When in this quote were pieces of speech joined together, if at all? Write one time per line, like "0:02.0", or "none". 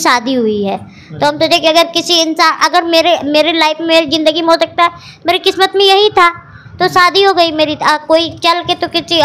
none